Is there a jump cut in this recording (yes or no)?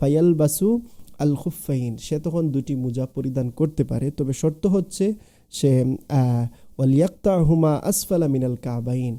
no